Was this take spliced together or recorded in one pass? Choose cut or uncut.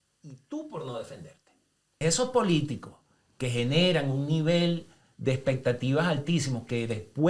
cut